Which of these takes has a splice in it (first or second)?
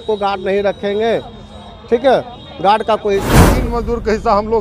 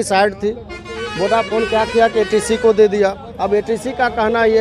first